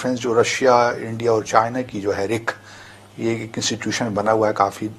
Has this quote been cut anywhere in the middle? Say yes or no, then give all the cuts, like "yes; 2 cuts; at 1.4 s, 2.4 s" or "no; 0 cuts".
no; 0 cuts